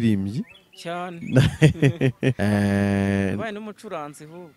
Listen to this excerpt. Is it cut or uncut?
cut